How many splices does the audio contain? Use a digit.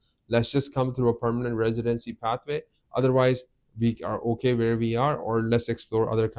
0